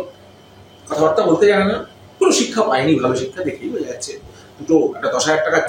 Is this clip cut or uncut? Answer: uncut